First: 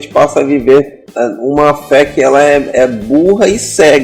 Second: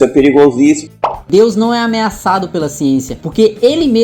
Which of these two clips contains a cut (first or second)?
second